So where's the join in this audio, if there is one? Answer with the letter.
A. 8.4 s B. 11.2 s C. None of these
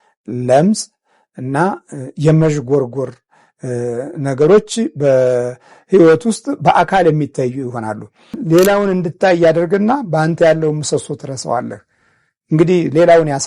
A